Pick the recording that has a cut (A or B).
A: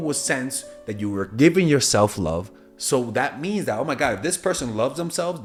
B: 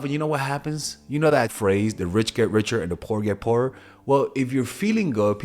B